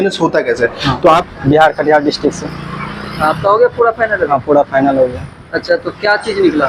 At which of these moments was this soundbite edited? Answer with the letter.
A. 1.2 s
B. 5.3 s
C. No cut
A